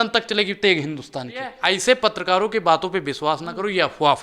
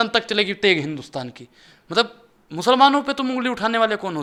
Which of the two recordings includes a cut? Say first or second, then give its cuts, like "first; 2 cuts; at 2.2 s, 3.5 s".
first; 1 cut; at 1.5 s